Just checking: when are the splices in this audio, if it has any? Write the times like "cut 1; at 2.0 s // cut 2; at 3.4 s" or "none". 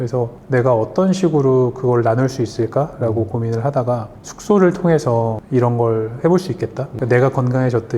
cut 1; at 4.1 s